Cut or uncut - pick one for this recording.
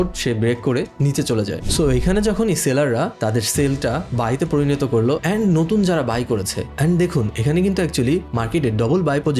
cut